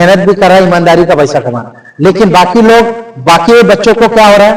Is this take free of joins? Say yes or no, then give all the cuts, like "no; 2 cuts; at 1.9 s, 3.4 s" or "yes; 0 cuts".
yes; 0 cuts